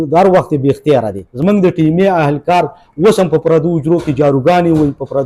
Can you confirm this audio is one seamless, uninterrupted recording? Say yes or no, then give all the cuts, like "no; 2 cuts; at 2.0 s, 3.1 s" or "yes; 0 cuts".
no; 1 cut; at 1.2 s